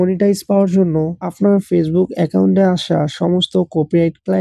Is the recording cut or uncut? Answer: cut